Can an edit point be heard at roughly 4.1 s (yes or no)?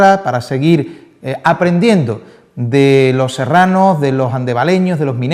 no